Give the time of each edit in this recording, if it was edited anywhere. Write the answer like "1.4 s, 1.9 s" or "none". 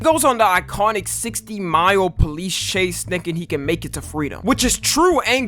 4.0 s